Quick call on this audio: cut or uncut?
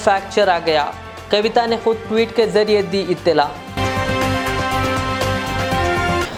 uncut